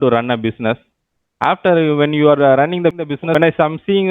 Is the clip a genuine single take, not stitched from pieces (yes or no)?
no